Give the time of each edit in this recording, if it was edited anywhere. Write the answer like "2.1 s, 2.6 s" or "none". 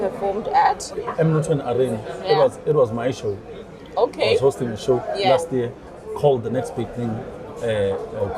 1.0 s